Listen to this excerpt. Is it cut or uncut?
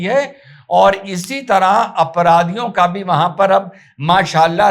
uncut